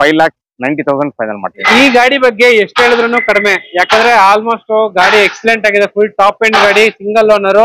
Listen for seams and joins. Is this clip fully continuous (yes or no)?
no